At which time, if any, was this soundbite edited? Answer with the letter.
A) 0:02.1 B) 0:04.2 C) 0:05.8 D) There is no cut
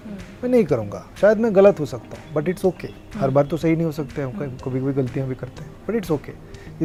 D